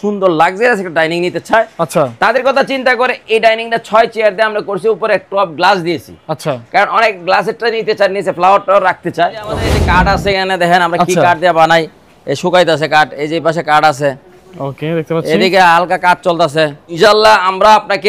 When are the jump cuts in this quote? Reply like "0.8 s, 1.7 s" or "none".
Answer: 9.6 s, 16.8 s